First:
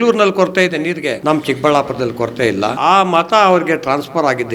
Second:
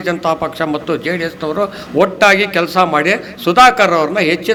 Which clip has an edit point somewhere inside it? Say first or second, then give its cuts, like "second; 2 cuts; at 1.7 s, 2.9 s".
first; 2 cuts; at 1.2 s, 2.8 s